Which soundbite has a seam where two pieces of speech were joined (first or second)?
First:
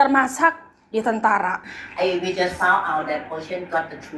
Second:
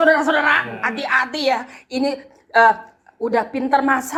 first